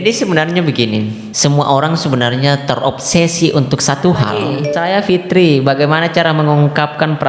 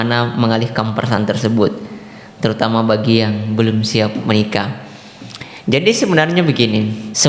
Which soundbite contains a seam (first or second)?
first